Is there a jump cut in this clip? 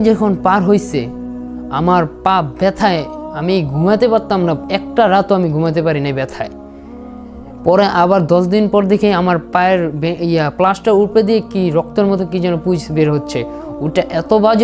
no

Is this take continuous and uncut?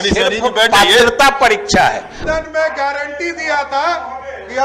no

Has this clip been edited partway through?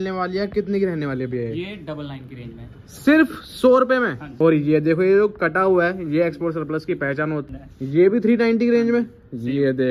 yes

